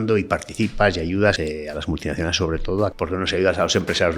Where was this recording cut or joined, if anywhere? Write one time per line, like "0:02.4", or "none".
0:01.4
0:02.9

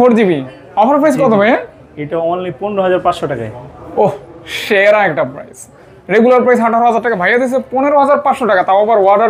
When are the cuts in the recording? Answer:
none

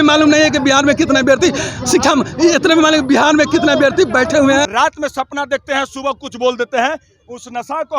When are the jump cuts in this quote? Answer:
0:04.6

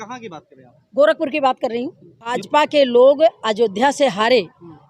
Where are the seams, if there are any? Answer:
0:02.4

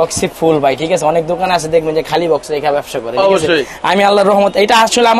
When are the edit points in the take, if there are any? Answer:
none

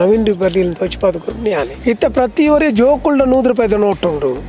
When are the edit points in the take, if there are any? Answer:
0:01.7

